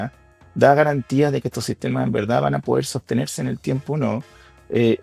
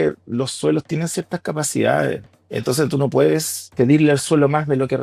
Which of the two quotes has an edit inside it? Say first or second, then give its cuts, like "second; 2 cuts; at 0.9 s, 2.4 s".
second; 2 cuts; at 2.3 s, 3.7 s